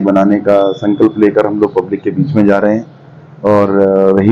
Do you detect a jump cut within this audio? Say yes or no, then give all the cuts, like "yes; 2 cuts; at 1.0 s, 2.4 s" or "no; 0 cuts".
no; 0 cuts